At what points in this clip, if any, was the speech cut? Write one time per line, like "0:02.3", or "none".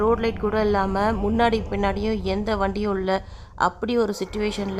none